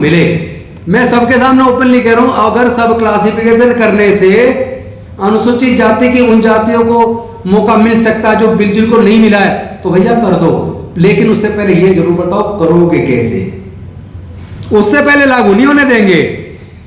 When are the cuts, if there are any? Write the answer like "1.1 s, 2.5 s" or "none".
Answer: none